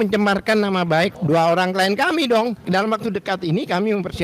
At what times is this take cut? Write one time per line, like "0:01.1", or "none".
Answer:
0:01.2
0:02.6